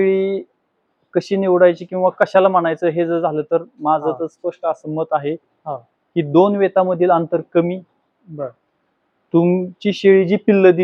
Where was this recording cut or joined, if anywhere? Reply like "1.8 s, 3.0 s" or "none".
none